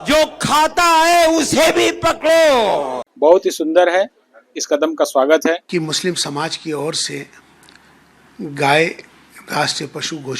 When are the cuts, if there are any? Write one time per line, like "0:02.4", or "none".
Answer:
0:03.0
0:05.6

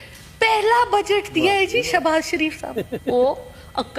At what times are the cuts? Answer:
none

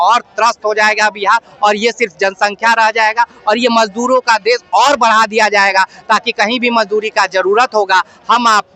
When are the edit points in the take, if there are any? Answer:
none

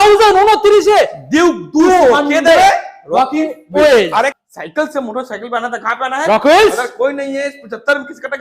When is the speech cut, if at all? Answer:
0:04.4

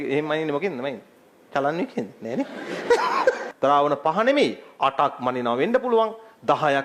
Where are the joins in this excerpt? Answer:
0:03.5

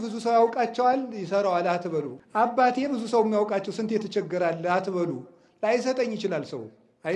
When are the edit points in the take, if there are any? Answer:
0:02.2

